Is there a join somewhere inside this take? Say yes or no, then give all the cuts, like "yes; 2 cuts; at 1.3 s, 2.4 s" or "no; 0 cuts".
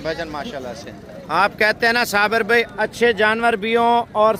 no; 0 cuts